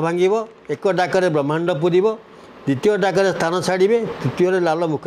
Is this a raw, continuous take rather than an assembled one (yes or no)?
yes